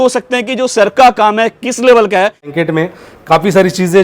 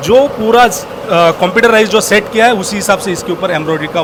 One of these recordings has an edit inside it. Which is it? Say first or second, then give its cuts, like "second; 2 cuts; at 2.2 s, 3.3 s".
first; 1 cut; at 2.5 s